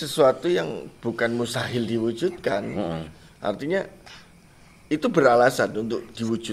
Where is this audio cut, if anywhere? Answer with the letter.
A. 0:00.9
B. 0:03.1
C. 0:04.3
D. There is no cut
D